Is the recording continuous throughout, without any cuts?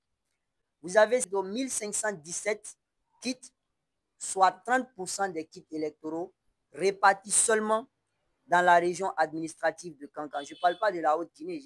no; 1 cut; at 1.3 s

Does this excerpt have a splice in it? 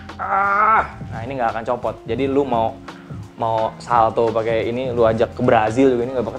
no; 0 cuts

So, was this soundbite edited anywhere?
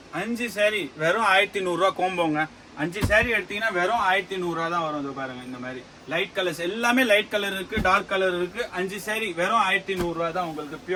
no; 0 cuts

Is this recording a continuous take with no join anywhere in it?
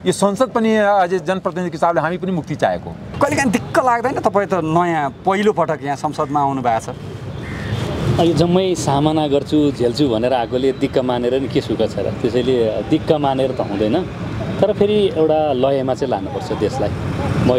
yes; 0 cuts

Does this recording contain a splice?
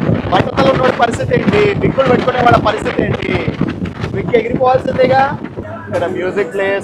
yes; 1 cut; at 5.6 s

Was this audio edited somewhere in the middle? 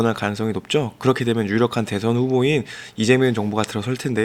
no; 0 cuts

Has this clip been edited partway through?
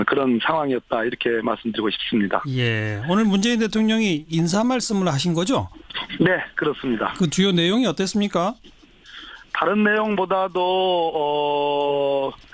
no; 0 cuts

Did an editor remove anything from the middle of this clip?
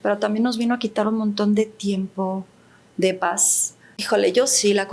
yes; 1 cut; at 4.0 s

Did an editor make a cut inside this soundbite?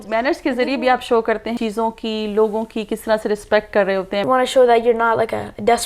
yes; 2 cuts; at 1.6 s, 4.2 s

